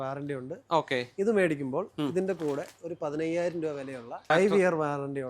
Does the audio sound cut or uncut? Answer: cut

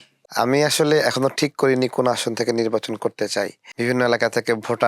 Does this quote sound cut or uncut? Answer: cut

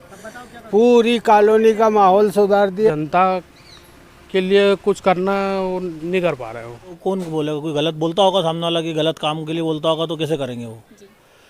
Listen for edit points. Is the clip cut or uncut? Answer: cut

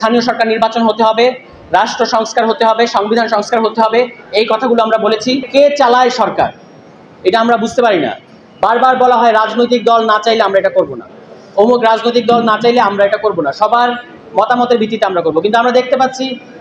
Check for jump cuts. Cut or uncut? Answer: cut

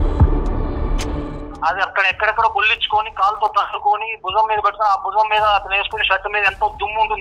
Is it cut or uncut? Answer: cut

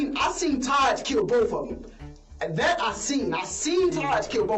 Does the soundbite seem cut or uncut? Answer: uncut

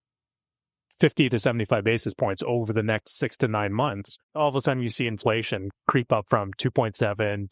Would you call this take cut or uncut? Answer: cut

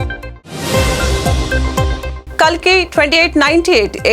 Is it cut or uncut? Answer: cut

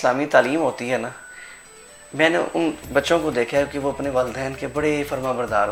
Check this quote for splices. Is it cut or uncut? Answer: uncut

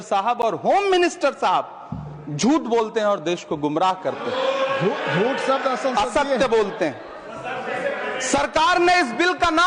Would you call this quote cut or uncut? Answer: uncut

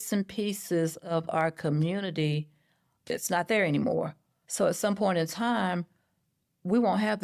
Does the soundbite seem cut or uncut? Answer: cut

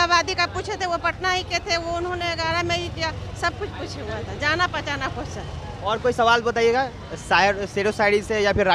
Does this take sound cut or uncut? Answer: uncut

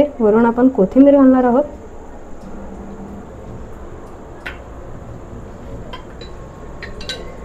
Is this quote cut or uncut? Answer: uncut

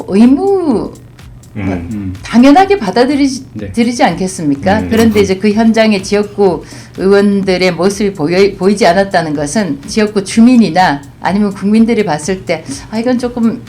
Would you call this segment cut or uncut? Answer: cut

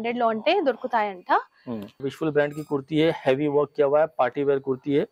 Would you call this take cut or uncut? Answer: cut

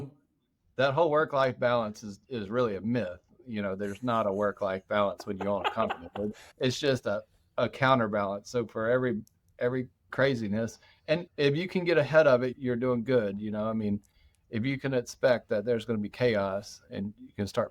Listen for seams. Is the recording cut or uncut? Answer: cut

